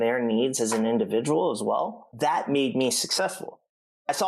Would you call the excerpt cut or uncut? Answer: cut